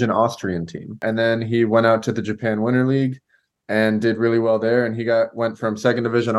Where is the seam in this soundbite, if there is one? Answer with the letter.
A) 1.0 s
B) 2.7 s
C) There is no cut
A